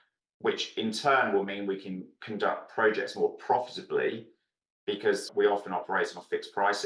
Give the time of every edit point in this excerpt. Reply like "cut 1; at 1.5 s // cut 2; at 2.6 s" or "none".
cut 1; at 5.3 s